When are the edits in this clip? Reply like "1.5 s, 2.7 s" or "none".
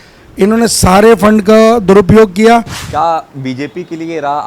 2.8 s

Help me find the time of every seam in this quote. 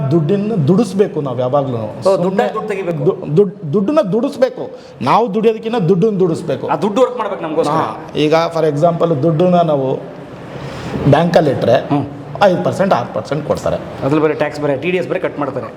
none

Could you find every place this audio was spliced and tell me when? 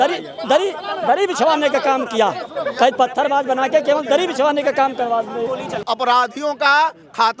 5.8 s

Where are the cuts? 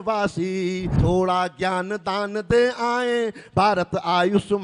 0.9 s

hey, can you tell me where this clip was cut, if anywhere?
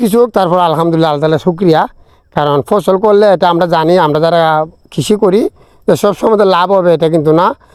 none

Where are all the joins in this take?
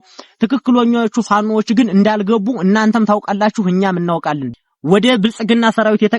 4.5 s

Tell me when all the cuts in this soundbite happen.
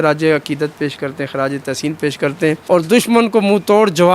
2.6 s

